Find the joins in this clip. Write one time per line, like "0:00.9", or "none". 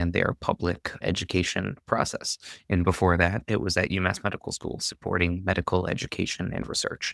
0:01.0